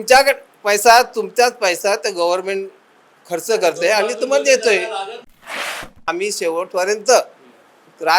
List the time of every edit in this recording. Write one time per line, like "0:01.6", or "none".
0:05.6